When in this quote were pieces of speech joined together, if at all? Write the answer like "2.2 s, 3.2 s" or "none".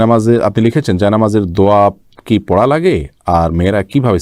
none